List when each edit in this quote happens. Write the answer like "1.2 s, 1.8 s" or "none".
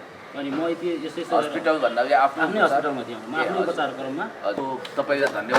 4.6 s

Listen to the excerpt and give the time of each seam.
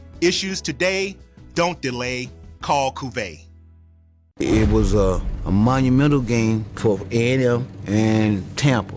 3.8 s

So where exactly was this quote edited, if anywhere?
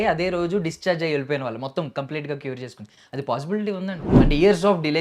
4.0 s

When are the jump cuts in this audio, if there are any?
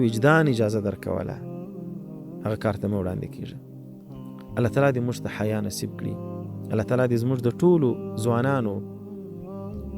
none

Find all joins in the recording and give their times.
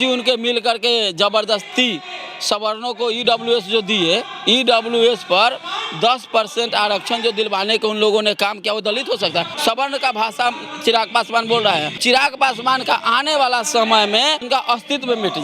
9.5 s, 12.0 s, 14.4 s

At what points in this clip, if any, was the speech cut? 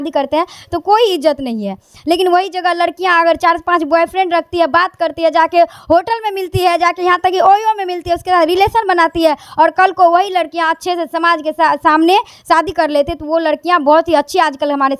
none

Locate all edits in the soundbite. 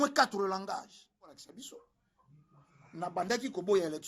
1.3 s

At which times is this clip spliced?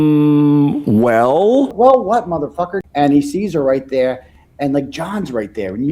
1.7 s, 2.8 s

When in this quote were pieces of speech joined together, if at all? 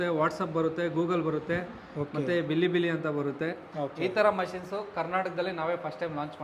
3.6 s

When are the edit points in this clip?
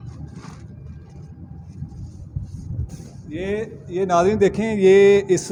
none

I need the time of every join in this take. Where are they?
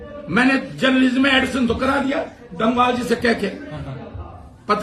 none

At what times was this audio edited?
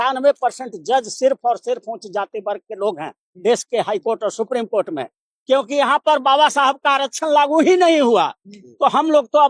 none

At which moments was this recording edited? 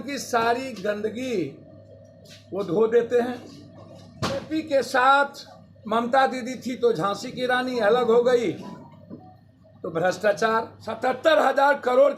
4.5 s, 10.8 s

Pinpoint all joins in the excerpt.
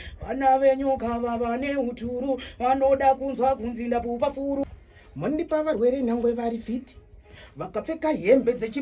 4.8 s

